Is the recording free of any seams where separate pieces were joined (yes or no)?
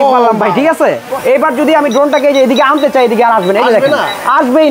no